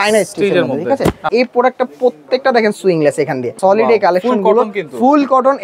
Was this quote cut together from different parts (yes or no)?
yes